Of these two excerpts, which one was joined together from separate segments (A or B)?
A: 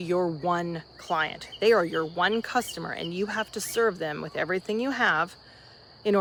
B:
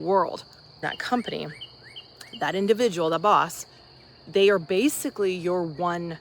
B